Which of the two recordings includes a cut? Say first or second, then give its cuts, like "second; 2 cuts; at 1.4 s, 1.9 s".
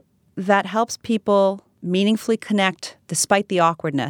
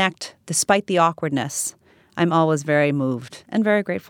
first; 1 cut; at 1.7 s